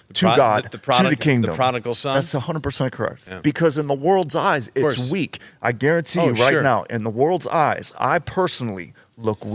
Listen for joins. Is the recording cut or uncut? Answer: cut